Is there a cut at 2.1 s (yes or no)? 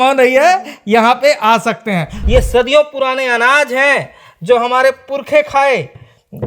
yes